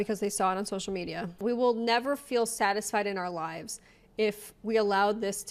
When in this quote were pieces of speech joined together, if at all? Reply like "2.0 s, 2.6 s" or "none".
1.4 s

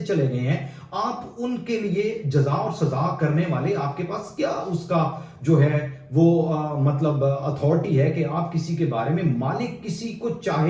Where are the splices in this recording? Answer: none

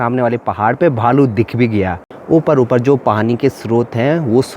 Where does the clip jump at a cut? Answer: 2.1 s

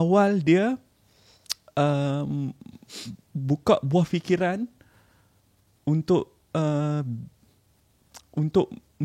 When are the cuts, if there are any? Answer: none

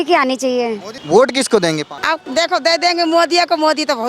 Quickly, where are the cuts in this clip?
0.9 s, 2.1 s

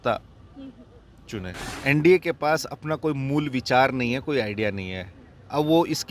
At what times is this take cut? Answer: 1.7 s

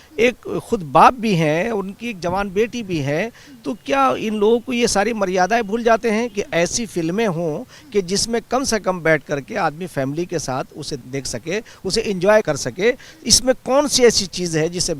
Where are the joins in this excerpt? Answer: 11.0 s, 12.4 s

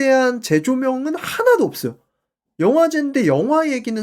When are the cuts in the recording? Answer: none

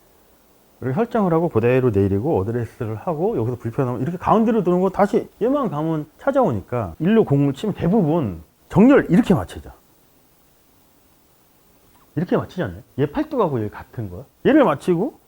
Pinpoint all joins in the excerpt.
6.9 s

